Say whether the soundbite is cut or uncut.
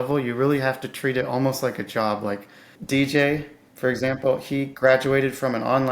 cut